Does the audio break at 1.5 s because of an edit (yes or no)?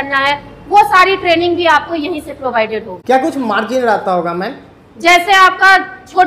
no